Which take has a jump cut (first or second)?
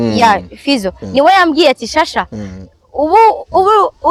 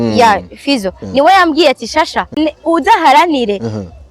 second